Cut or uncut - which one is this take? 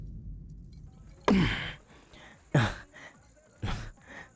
cut